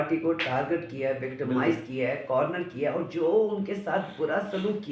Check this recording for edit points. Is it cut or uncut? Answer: uncut